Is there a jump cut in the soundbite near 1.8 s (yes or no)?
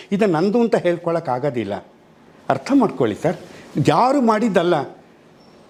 no